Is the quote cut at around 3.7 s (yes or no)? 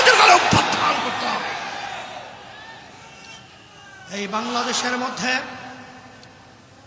no